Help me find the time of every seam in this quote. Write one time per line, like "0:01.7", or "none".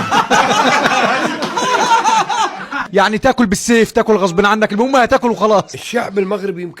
0:02.8
0:05.8